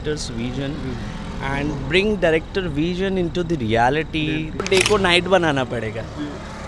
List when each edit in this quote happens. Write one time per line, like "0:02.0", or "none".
0:04.6